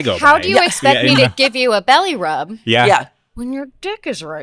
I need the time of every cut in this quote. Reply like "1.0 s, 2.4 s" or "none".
none